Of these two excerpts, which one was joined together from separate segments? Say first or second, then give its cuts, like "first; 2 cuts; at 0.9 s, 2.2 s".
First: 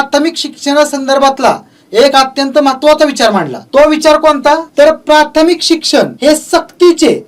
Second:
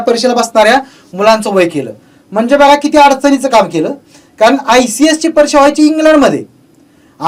first; 3 cuts; at 3.6 s, 4.7 s, 6.1 s